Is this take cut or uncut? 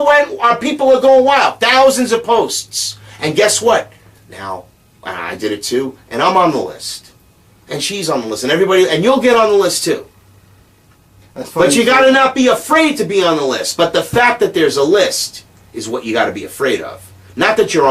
cut